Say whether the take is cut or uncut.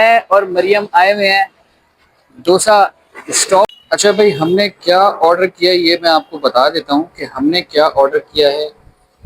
cut